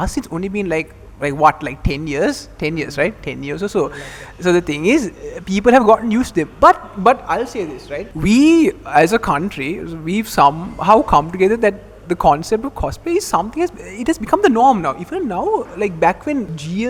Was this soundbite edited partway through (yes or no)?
no